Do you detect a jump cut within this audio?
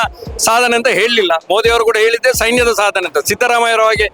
no; 0 cuts

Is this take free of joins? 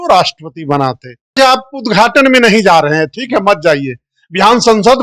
no; 1 cut; at 1.3 s

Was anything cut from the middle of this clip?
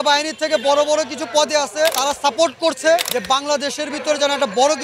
yes; 2 cuts; at 2.0 s, 3.1 s

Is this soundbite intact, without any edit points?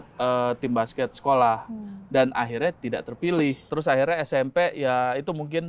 no; 1 cut; at 3.7 s

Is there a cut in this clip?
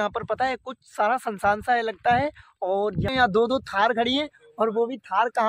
yes; 1 cut; at 3.1 s

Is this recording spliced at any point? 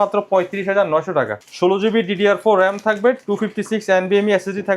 yes; 1 cut; at 1.4 s

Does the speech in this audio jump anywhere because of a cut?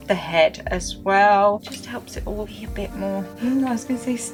no; 0 cuts

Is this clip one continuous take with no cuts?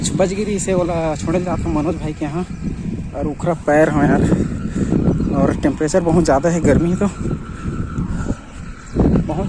yes; 0 cuts

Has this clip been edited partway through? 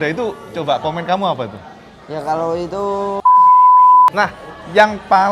yes; 2 cuts; at 3.2 s, 4.1 s

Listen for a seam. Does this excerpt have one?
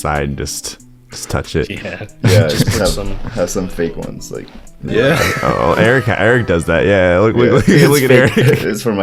no; 0 cuts

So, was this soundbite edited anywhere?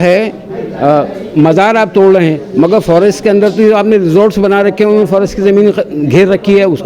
no; 0 cuts

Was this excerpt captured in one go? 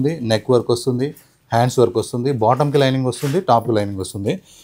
yes; 0 cuts

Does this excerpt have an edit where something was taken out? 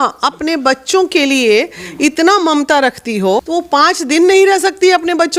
yes; 1 cut; at 3.4 s

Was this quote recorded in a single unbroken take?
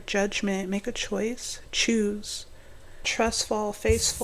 no; 1 cut; at 3.1 s

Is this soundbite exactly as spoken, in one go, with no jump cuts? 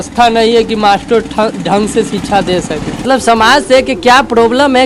no; 1 cut; at 3.0 s

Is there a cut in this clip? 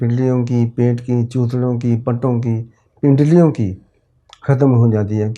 no; 0 cuts

